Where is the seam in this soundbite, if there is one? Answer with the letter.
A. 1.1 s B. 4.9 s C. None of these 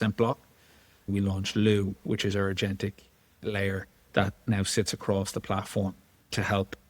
A